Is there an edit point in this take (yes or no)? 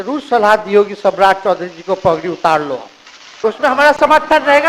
yes